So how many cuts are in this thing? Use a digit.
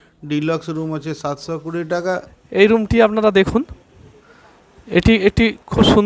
1